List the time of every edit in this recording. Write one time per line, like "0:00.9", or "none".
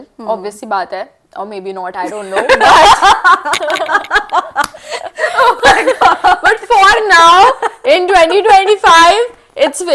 none

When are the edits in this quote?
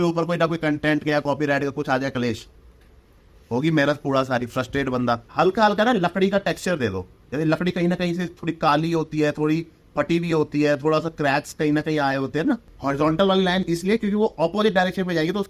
0:05.3
0:12.7

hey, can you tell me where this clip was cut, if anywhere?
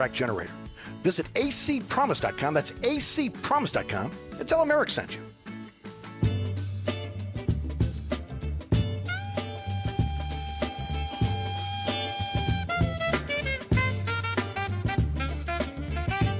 0:06.1

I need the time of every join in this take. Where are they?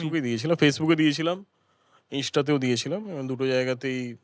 none

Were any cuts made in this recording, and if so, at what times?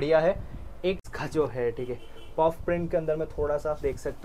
0:01.0

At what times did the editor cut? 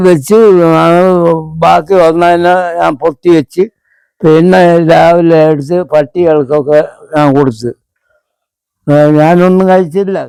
none

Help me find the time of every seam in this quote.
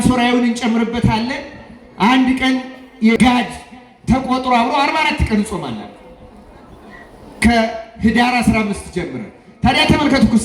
0:03.1

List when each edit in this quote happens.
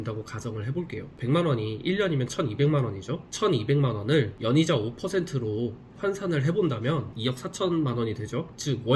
none

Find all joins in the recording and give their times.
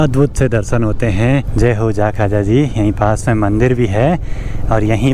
none

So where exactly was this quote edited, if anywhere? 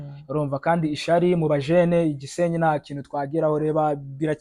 none

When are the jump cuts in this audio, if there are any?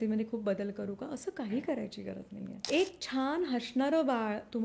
0:02.6

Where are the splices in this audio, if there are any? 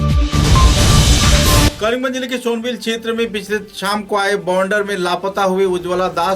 0:01.7

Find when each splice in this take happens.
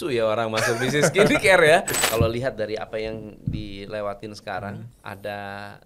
0:02.0
0:04.9

